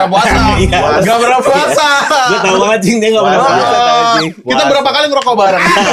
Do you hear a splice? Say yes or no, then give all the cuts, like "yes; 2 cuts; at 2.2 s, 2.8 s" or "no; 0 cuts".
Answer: no; 0 cuts